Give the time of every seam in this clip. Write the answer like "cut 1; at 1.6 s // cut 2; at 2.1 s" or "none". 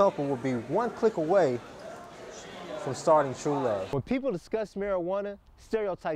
cut 1; at 3.9 s